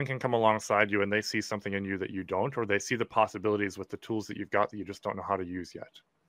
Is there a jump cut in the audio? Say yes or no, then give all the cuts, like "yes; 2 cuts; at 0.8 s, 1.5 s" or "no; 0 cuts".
no; 0 cuts